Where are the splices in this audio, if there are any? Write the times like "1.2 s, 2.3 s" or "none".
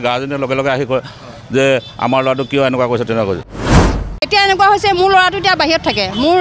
3.9 s